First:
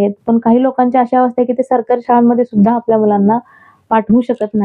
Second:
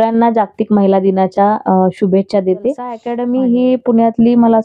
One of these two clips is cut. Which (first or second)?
second